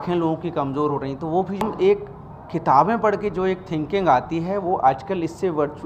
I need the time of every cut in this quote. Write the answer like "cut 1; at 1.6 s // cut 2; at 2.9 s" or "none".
cut 1; at 1.6 s